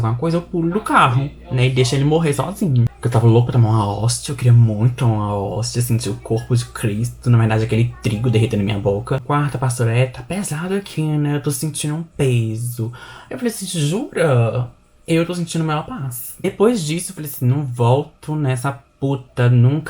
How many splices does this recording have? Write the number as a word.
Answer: three